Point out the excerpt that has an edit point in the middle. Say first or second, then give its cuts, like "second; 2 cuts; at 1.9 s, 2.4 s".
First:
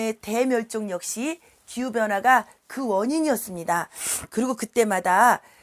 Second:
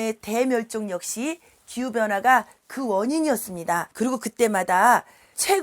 second; 1 cut; at 3.9 s